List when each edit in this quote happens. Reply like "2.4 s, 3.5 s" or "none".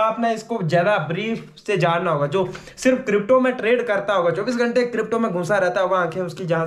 none